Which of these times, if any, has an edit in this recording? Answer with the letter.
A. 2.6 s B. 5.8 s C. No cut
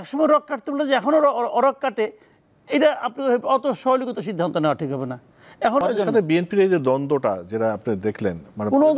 B